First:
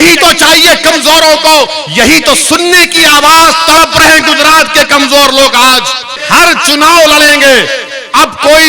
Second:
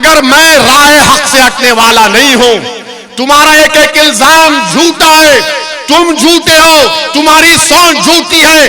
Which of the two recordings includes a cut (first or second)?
first